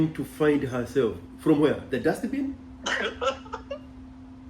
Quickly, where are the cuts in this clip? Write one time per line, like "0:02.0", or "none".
none